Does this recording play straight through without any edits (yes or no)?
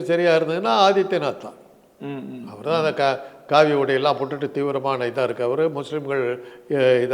yes